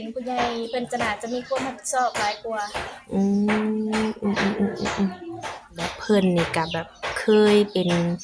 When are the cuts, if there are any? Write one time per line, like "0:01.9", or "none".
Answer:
0:05.9